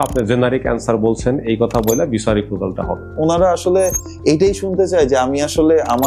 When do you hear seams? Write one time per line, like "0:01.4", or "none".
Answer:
0:03.1